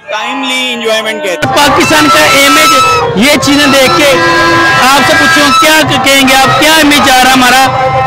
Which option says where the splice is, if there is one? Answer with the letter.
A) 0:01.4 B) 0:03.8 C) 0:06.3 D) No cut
A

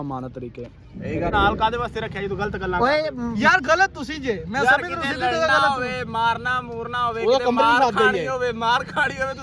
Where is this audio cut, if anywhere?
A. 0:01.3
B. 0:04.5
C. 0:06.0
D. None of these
A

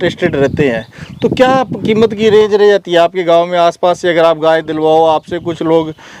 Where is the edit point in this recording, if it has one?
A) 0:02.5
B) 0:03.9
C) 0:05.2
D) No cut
D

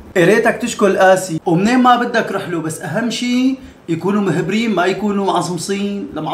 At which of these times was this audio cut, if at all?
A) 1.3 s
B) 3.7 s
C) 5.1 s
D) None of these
A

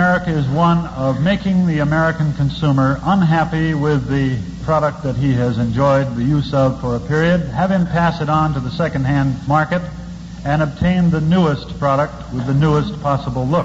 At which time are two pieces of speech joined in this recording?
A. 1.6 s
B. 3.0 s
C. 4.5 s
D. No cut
D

